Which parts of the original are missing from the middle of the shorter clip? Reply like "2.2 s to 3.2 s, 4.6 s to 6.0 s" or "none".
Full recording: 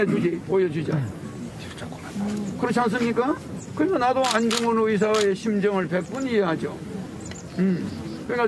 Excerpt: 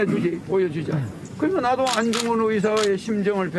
1.2 s to 3.6 s